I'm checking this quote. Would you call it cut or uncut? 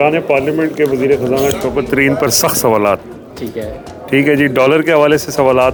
uncut